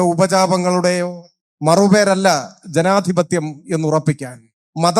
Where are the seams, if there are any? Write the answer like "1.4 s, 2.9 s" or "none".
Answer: none